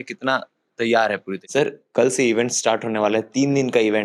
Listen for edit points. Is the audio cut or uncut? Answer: cut